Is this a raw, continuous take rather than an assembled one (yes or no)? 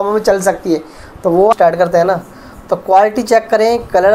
no